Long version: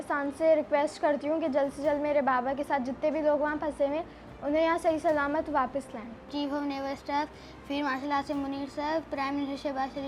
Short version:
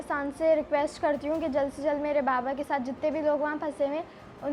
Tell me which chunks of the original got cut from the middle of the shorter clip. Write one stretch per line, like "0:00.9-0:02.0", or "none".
none

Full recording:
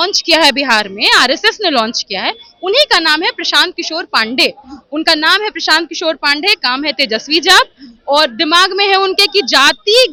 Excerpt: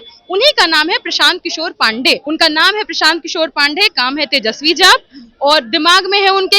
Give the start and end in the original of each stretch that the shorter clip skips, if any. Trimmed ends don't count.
0:04.6-0:04.9

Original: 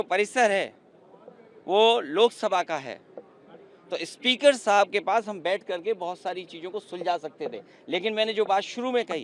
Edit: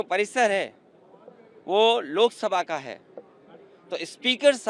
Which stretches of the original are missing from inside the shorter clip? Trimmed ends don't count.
none

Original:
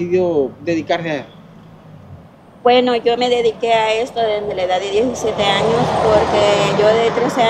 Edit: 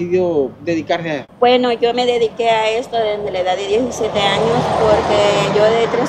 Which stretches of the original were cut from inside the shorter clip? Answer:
0:01.3-0:02.5

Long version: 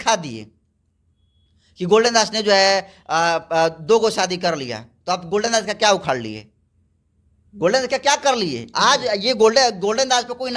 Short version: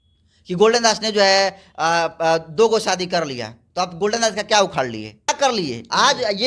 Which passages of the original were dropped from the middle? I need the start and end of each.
0:06.6-0:08.1

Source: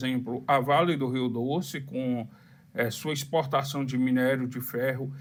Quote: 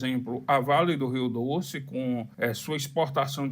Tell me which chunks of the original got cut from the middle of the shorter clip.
0:02.3-0:02.7

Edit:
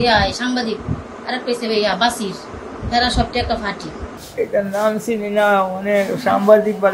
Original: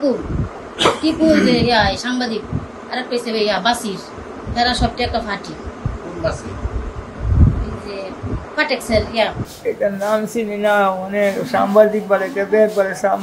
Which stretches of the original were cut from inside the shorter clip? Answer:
0:05.8-0:09.5

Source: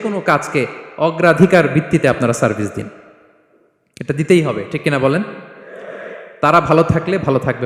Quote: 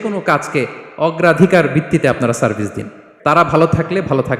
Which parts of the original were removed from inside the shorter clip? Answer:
0:03.4-0:06.5

